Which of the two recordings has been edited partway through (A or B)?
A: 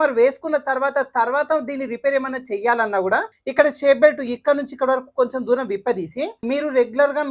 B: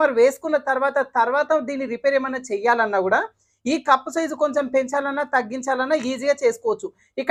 A